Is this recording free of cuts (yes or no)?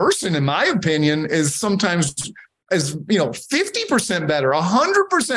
yes